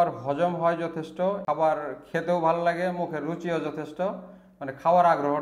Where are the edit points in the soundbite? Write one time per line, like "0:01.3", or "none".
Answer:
0:01.4